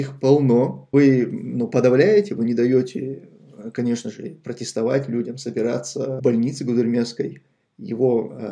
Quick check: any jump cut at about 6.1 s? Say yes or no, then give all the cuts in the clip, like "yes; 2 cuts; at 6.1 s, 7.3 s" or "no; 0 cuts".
yes; 2 cuts; at 0.9 s, 6.1 s